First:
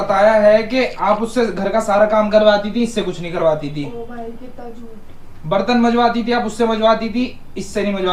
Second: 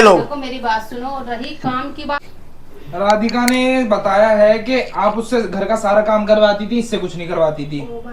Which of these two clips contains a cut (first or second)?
second